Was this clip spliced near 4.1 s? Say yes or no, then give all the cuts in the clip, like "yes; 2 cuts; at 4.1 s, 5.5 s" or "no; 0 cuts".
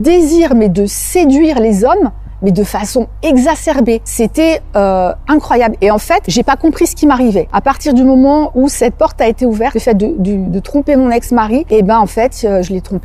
yes; 5 cuts; at 4.1 s, 6.3 s, 7.5 s, 9.8 s, 11.6 s